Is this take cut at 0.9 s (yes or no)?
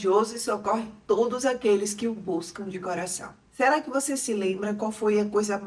no